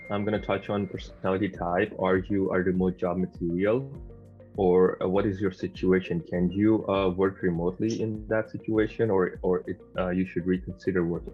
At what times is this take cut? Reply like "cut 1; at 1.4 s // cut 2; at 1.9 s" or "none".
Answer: none